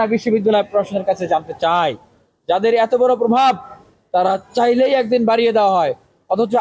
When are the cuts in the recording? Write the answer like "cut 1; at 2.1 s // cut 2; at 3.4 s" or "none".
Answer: none